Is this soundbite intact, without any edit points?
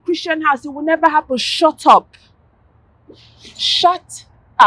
yes; 0 cuts

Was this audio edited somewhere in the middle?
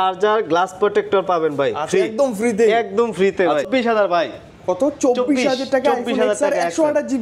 yes; 1 cut; at 3.7 s

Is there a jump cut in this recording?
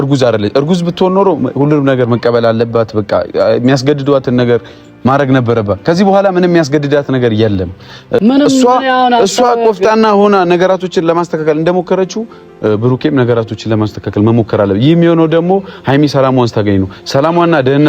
yes; 1 cut; at 8.2 s

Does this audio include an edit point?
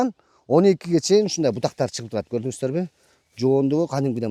no; 0 cuts

